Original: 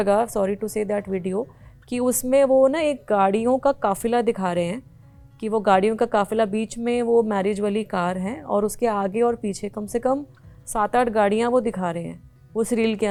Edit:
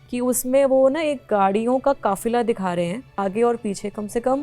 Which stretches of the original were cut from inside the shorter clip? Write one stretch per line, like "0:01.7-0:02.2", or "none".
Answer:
0:05.0-0:09.0